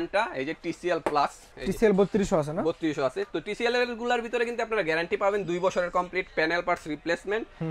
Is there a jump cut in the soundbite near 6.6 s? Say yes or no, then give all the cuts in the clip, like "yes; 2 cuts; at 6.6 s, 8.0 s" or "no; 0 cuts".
no; 1 cut; at 1.5 s